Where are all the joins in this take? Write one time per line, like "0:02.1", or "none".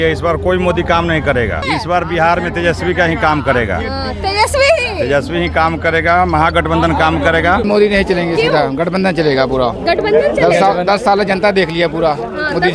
0:01.6
0:07.6